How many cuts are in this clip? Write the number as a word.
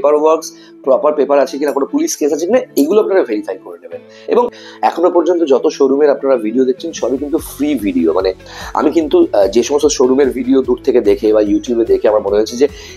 one